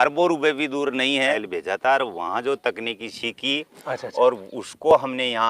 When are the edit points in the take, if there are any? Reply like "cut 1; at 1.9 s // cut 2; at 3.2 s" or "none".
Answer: cut 1; at 1.4 s